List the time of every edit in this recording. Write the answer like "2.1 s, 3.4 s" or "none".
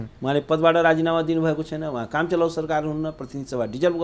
none